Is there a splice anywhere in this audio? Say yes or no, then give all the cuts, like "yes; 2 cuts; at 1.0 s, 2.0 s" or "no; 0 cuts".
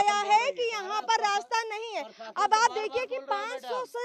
no; 0 cuts